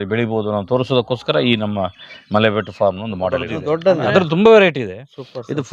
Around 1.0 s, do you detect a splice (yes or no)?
no